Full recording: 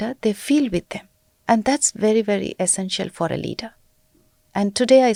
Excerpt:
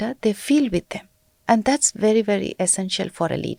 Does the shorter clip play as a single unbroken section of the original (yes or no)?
yes